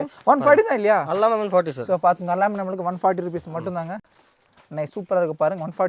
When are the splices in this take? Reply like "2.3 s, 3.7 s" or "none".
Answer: none

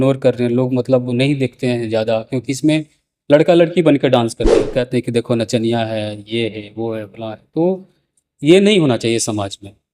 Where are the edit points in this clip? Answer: 4.8 s

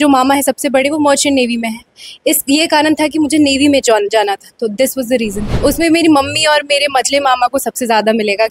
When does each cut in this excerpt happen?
5.4 s

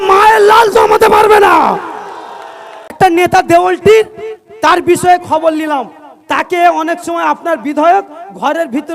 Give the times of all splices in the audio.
2.9 s

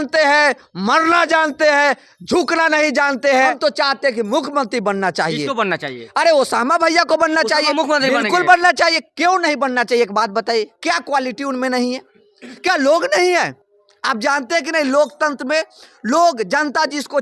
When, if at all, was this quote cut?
3.6 s

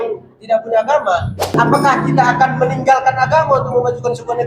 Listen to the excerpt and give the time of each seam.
1.5 s

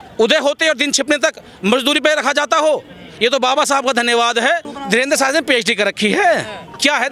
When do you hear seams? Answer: 4.7 s

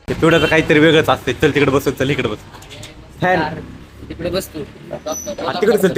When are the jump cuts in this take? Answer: none

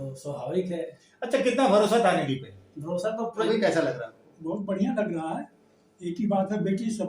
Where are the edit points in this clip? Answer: 3.4 s

